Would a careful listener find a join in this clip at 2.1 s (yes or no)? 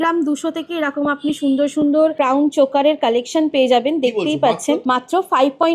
yes